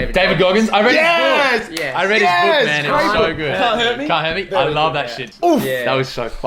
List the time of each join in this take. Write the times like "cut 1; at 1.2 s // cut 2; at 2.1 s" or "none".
cut 1; at 5.2 s